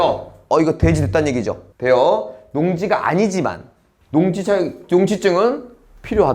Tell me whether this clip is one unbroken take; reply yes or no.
no